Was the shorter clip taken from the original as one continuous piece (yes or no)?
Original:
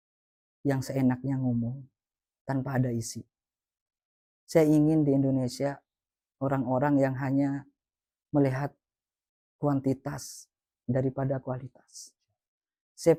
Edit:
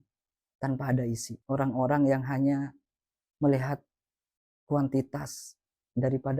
no